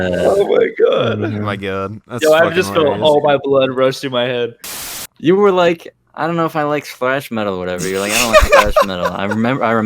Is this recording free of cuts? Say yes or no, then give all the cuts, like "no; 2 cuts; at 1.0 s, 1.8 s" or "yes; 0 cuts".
no; 1 cut; at 4.6 s